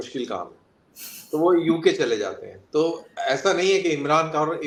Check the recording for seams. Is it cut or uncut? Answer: uncut